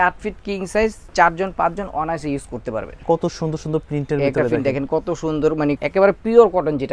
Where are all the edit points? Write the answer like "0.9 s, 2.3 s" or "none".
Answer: 2.9 s, 5.8 s